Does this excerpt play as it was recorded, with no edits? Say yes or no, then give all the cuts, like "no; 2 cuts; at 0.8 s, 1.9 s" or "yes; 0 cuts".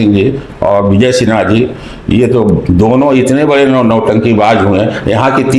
yes; 0 cuts